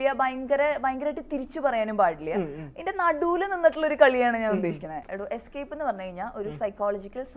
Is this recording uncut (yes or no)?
no